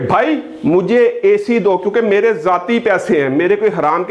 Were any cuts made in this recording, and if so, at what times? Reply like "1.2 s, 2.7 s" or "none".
none